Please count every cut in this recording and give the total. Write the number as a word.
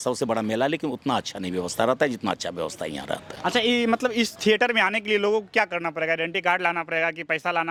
zero